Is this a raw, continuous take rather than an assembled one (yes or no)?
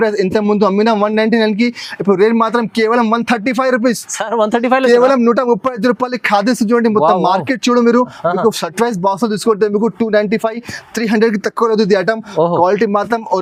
yes